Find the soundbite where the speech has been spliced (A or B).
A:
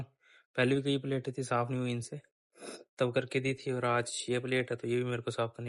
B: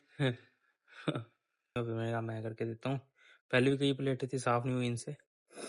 B